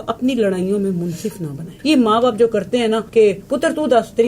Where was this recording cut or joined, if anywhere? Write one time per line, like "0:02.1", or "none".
0:01.6
0:03.1